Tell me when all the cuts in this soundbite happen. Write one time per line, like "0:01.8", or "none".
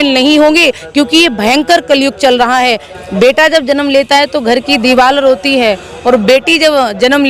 0:02.8